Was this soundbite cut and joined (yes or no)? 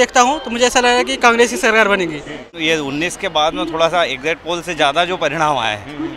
yes